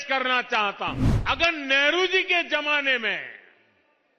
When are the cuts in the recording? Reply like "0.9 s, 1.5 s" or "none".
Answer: 1.1 s